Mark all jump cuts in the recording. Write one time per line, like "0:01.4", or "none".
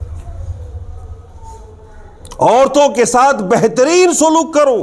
none